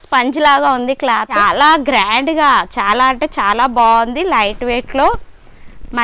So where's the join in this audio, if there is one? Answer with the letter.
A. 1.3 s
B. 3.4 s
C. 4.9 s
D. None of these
A